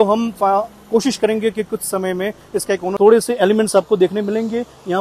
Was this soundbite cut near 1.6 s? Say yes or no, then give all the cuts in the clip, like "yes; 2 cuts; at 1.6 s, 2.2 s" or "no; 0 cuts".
no; 1 cut; at 2.9 s